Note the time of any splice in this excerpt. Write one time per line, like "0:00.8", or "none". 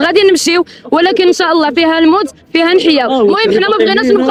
none